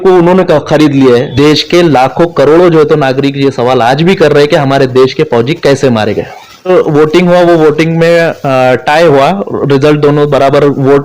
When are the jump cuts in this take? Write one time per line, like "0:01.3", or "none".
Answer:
0:01.3
0:06.7